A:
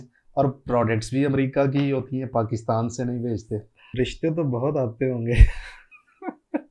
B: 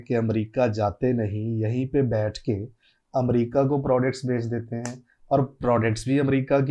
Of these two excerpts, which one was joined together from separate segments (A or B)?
A